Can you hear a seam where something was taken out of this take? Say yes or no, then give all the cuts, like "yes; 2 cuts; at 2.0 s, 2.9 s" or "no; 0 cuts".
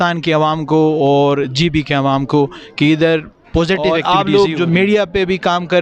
yes; 1 cut; at 4.0 s